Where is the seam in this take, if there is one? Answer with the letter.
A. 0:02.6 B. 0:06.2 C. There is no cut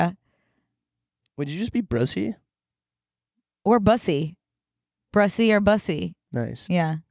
B